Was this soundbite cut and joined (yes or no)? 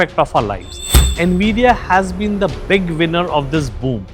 yes